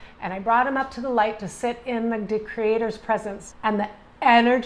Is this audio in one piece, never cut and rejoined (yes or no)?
no